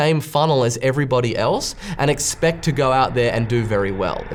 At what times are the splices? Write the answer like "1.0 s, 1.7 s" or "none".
none